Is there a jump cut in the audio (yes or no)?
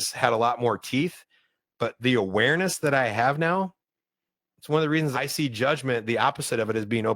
yes